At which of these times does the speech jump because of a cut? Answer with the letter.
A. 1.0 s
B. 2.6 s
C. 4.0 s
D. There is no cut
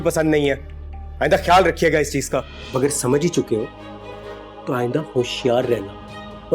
B